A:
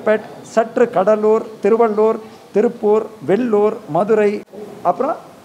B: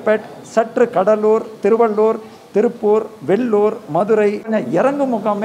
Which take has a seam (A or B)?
B